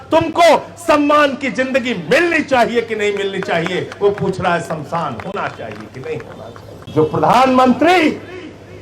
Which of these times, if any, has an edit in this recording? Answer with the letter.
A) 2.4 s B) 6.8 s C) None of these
B